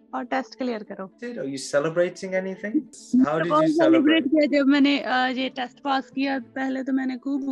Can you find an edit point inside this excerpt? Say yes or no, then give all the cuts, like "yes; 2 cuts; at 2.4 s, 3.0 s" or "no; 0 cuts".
yes; 2 cuts; at 1.3 s, 3.0 s